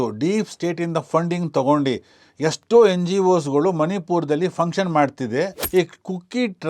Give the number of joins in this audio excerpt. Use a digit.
1